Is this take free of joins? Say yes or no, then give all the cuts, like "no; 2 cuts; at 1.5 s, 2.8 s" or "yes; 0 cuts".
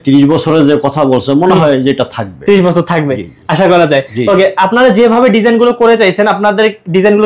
yes; 0 cuts